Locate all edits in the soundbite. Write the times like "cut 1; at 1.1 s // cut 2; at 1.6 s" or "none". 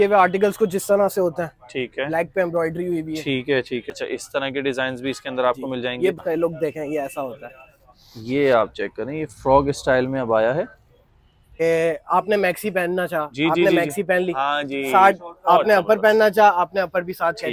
cut 1; at 3.9 s // cut 2; at 6.2 s // cut 3; at 11.6 s